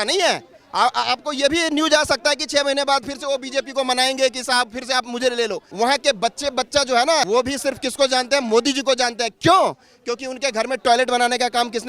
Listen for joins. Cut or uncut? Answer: cut